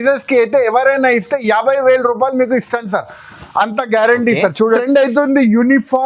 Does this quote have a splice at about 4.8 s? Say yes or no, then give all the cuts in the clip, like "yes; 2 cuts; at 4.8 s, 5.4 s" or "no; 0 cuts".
yes; 1 cut; at 4.8 s